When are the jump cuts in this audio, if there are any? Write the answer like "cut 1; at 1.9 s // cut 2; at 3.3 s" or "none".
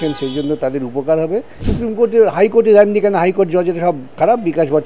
cut 1; at 1.7 s

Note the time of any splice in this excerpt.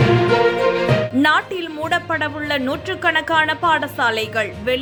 none

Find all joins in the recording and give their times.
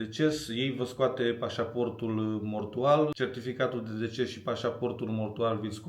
cut 1; at 3.1 s

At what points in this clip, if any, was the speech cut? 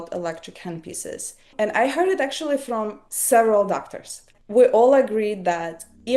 cut 1; at 4.3 s

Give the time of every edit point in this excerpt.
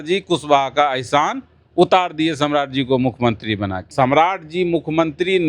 cut 1; at 3.8 s

